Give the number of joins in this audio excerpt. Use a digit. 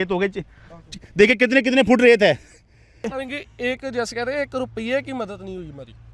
1